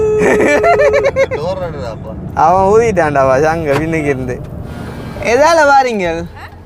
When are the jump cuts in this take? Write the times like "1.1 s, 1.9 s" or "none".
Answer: 4.6 s